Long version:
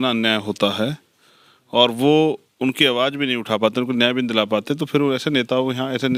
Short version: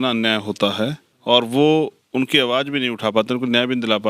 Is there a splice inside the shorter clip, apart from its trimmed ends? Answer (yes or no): yes